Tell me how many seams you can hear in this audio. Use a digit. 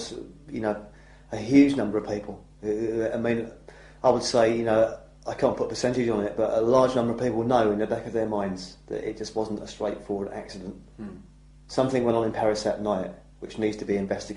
1